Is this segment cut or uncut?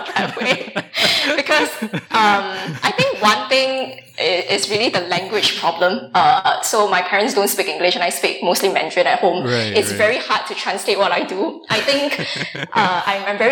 uncut